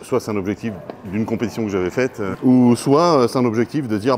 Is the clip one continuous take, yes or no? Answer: no